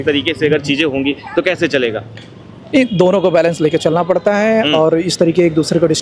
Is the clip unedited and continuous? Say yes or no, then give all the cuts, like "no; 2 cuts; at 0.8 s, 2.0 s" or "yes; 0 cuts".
yes; 0 cuts